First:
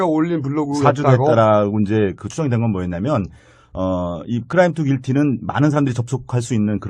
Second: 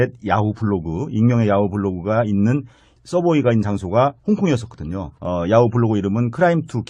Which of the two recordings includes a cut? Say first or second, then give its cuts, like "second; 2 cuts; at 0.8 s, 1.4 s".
first; 1 cut; at 2.4 s